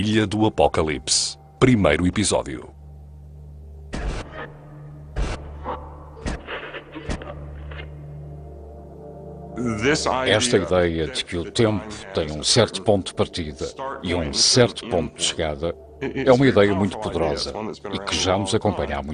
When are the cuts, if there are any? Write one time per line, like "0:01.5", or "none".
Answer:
0:11.9